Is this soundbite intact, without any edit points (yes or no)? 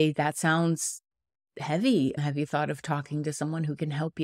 yes